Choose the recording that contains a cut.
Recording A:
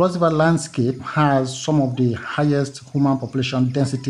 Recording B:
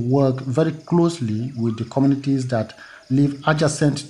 A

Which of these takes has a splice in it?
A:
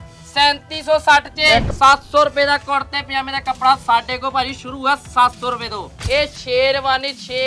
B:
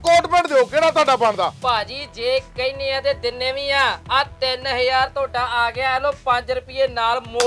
A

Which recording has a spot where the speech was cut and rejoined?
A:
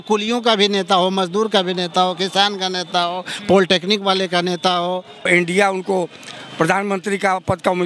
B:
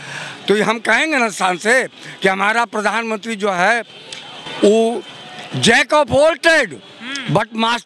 A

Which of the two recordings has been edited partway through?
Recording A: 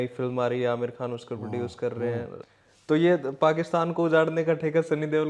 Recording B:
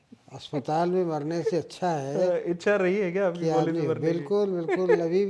A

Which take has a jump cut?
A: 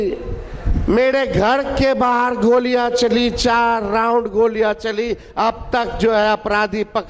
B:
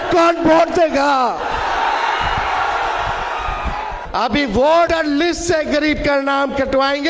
B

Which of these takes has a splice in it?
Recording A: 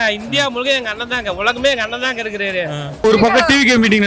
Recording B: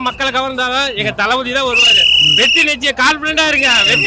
A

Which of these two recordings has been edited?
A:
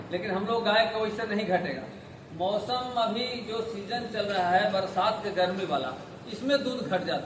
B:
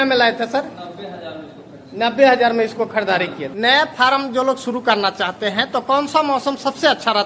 B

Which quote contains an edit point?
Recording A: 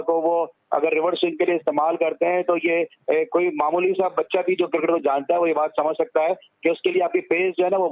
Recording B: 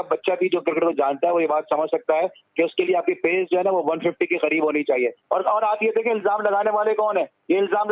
B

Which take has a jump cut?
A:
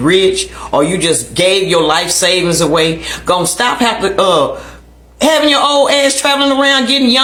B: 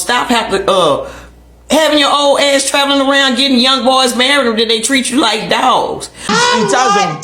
B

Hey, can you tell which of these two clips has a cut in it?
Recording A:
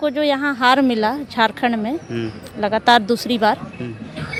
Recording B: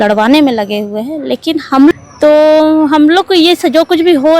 B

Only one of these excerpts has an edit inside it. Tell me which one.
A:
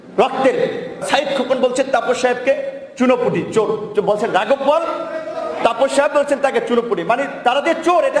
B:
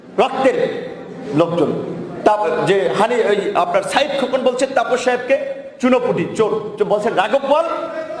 A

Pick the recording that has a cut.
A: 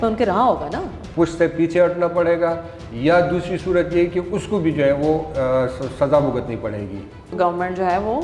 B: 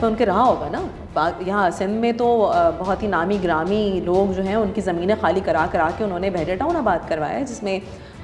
A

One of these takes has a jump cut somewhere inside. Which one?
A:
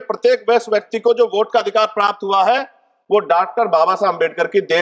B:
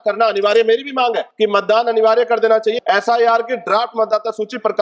B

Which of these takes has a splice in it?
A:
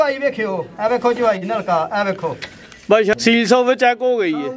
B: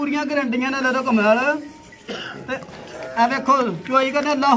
A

